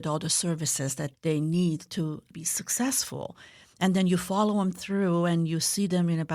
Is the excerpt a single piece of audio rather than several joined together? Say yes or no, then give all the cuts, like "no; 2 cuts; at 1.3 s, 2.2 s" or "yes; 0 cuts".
no; 1 cut; at 1.1 s